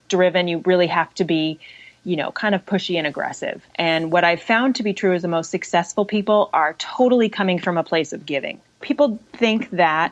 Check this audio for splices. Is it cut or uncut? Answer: cut